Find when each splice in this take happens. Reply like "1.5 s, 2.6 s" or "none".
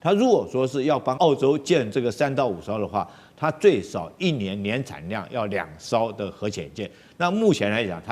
1.2 s